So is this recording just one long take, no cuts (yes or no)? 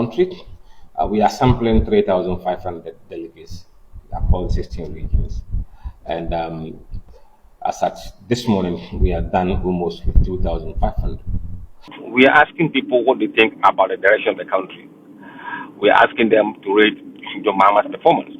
no